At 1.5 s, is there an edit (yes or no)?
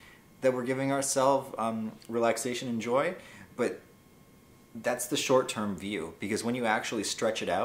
no